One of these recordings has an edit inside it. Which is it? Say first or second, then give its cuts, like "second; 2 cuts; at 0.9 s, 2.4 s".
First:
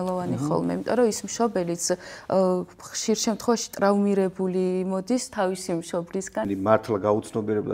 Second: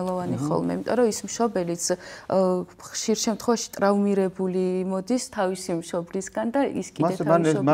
first; 1 cut; at 6.4 s